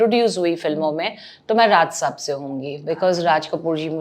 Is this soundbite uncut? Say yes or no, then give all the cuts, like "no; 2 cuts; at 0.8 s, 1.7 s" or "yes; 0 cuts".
yes; 0 cuts